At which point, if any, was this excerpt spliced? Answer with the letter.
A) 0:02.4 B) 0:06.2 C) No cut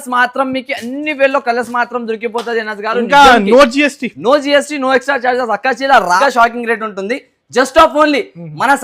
B